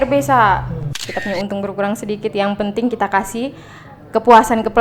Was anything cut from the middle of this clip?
yes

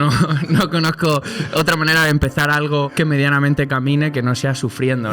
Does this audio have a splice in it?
yes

